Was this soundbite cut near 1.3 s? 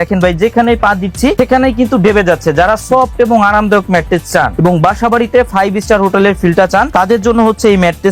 yes; 3 cuts; at 1.3 s, 4.5 s, 6.9 s

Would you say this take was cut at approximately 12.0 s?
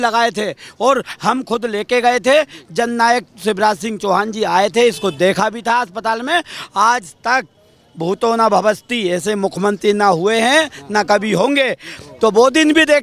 yes; 1 cut; at 12.0 s

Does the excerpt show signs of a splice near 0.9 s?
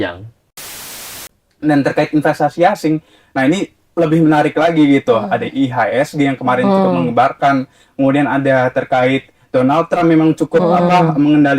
yes; 1 cut; at 0.9 s

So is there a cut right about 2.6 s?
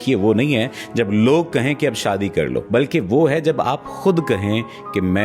yes; 1 cut; at 2.6 s

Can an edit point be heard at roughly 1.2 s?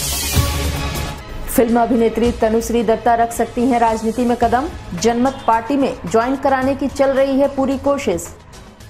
yes; 1 cut; at 1.2 s

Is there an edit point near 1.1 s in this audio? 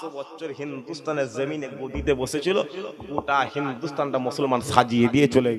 no; 0 cuts

